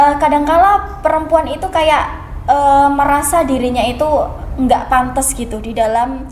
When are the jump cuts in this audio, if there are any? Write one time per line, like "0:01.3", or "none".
none